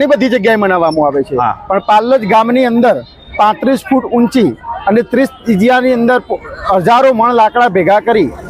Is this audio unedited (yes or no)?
yes